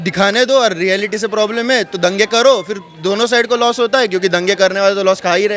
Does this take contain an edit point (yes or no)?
no